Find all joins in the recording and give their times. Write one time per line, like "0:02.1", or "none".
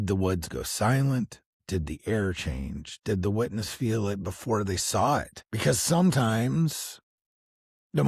0:05.4